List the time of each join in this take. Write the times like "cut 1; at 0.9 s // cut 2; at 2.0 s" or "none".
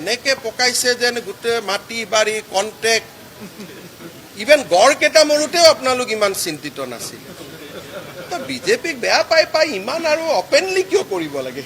none

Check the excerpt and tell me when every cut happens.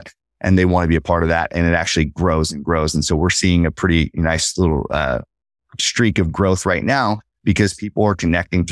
none

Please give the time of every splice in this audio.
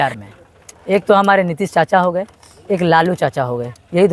none

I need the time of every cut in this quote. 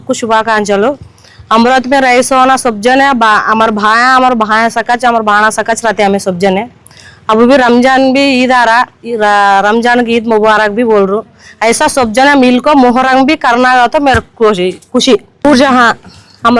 cut 1; at 15.3 s

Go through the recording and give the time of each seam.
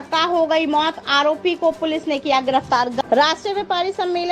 cut 1; at 3.0 s

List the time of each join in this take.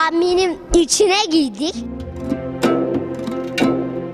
cut 1; at 2.0 s

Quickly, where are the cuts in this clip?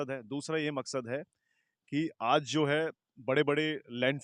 none

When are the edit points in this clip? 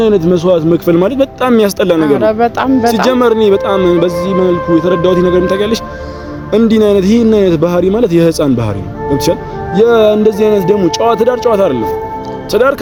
none

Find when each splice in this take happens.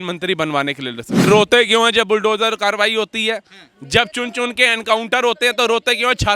cut 1; at 1.2 s

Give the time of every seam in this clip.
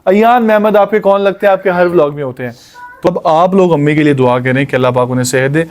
cut 1; at 3.1 s

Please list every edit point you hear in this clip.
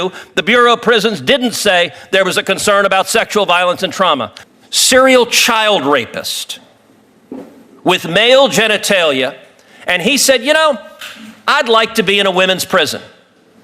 cut 1; at 4.4 s

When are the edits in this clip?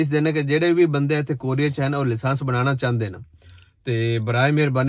none

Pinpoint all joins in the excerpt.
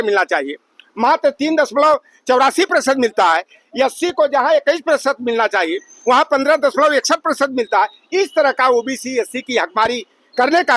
none

